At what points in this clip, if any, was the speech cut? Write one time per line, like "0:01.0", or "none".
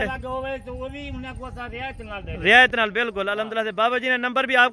none